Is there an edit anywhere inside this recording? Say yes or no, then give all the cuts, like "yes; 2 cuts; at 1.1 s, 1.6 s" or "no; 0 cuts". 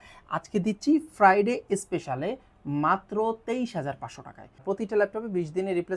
yes; 1 cut; at 4.6 s